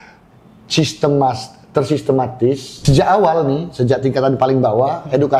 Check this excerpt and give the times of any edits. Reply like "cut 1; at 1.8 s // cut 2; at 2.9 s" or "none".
cut 1; at 2.7 s